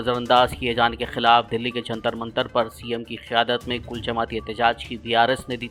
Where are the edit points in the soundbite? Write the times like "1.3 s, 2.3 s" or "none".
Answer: none